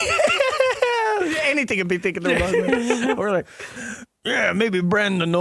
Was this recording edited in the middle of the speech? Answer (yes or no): no